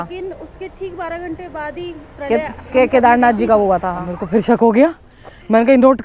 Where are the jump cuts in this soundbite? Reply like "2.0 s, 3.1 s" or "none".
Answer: 4.1 s